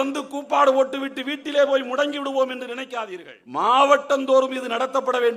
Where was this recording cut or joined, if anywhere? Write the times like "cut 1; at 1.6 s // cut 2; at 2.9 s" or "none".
cut 1; at 3.0 s